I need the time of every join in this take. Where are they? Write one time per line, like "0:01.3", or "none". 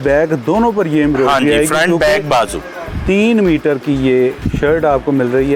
none